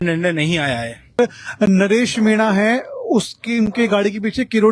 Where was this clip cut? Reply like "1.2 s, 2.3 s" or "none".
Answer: 1.2 s